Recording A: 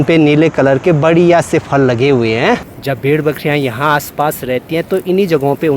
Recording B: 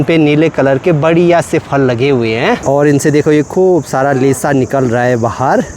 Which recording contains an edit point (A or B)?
A